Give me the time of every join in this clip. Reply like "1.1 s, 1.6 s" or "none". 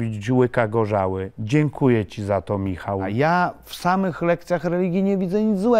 3.1 s